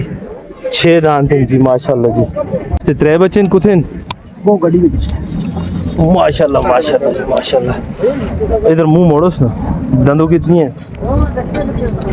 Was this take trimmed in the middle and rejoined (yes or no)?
yes